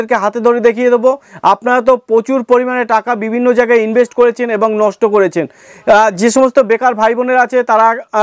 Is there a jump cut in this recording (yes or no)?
yes